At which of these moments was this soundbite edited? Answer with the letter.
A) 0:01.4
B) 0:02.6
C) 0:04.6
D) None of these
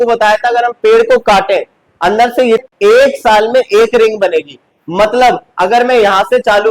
B